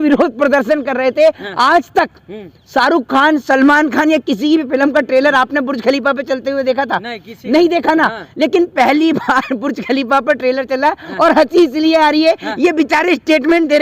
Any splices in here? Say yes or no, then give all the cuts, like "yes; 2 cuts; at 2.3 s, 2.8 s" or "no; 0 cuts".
no; 0 cuts